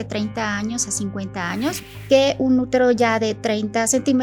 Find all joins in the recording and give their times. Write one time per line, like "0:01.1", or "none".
0:01.8